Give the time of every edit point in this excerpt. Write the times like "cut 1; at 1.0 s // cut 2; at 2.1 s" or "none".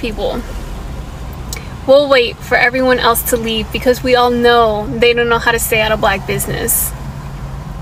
none